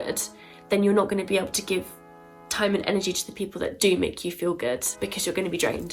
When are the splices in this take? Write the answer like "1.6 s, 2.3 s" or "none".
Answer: 4.9 s